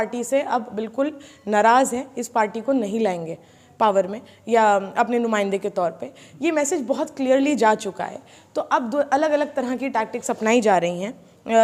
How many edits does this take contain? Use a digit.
0